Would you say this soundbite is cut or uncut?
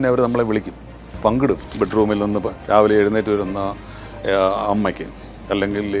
cut